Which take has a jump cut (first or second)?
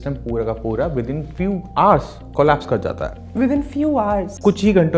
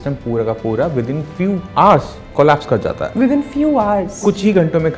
second